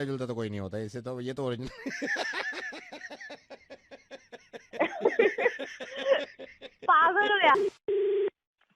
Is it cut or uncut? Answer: cut